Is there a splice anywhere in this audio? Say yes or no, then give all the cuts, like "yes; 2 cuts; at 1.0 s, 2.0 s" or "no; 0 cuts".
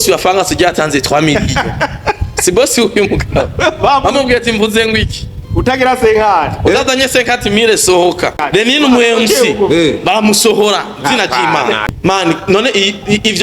yes; 2 cuts; at 8.4 s, 11.9 s